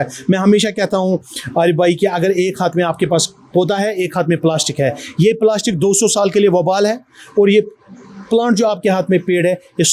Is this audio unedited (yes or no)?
yes